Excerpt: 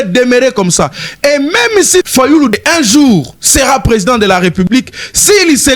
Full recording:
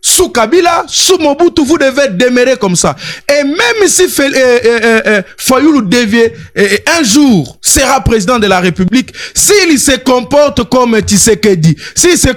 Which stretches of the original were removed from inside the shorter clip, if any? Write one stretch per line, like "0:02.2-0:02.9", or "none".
0:04.1-0:06.3